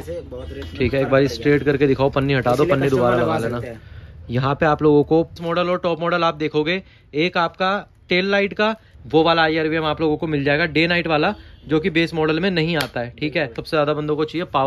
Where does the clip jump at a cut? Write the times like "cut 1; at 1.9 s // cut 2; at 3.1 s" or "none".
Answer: cut 1; at 5.3 s // cut 2; at 8.9 s // cut 3; at 13.6 s